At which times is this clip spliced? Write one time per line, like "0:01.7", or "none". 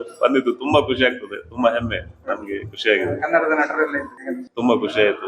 none